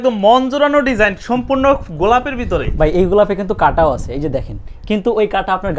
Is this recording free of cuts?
yes; 0 cuts

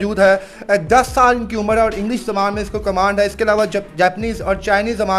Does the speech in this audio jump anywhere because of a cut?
no; 0 cuts

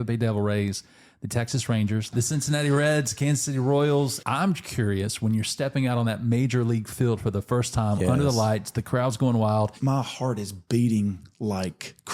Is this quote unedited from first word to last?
no; 3 cuts; at 2.1 s, 4.2 s, 9.8 s

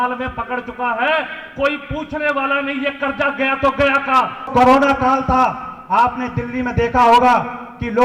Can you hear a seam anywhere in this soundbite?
yes; 1 cut; at 4.5 s

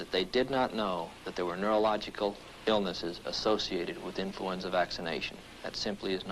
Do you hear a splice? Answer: no; 0 cuts

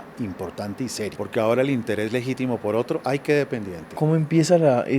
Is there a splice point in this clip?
yes; 2 cuts; at 1.1 s, 3.9 s

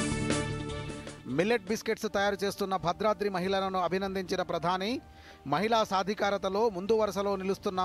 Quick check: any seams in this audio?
yes; 1 cut; at 0.9 s

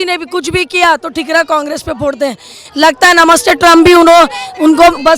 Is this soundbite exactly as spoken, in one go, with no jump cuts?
yes; 0 cuts

